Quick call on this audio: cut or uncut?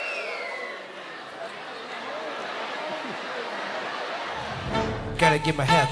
cut